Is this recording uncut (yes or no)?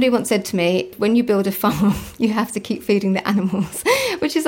no